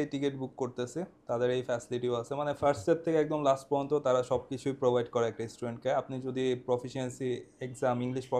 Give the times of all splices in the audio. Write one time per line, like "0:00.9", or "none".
none